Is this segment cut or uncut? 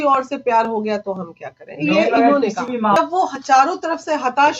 cut